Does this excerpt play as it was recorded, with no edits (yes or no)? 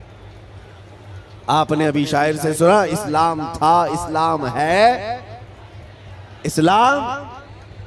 yes